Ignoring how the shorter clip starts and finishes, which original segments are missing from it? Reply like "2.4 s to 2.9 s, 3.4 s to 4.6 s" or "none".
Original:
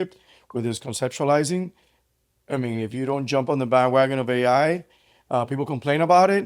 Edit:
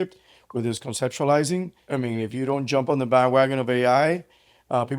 1.8 s to 2.4 s